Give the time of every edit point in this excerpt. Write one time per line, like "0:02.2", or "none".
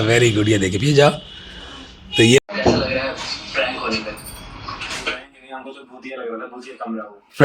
0:02.4